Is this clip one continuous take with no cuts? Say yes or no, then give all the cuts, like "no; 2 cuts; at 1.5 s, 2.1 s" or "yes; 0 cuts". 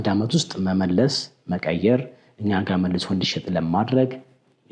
yes; 0 cuts